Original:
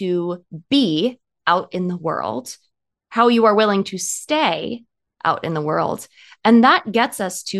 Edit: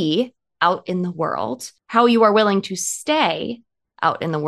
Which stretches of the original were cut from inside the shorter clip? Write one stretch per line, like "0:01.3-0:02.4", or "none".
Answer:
0:02.6-0:02.9